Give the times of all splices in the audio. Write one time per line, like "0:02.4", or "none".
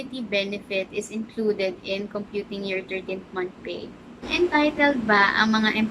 0:04.3